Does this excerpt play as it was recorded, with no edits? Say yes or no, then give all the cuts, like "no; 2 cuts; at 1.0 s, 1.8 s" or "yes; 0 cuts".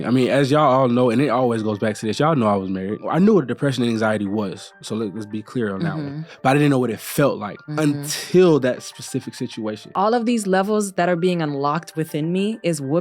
no; 2 cuts; at 3.0 s, 9.9 s